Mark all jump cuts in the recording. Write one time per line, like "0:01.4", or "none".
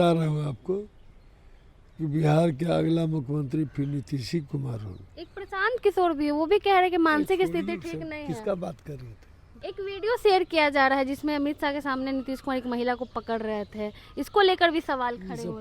0:09.6

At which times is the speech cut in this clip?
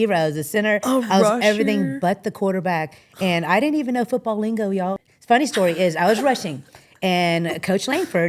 0:05.0

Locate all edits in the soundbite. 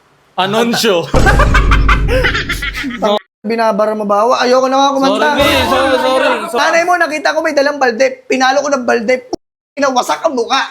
0:06.6

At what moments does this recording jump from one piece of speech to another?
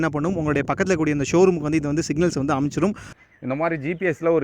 0:03.1

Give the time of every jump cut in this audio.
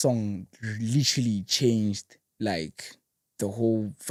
none

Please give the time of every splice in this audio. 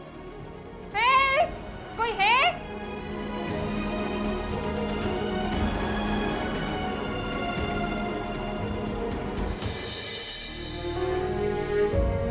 none

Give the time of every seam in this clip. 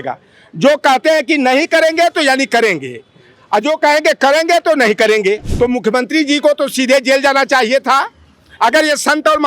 0:05.5

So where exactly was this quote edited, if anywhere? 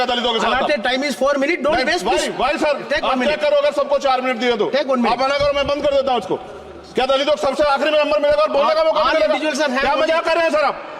none

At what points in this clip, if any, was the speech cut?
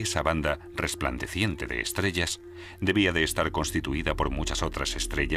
0:03.4

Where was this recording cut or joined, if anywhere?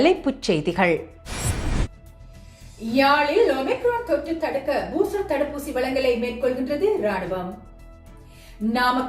0:01.2

